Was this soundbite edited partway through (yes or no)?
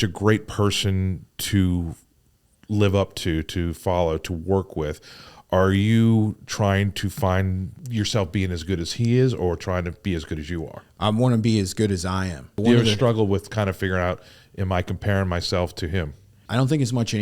yes